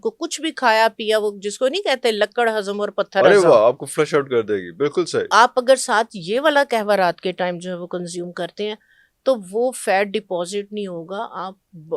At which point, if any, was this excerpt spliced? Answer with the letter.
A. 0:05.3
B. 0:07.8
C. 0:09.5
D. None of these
A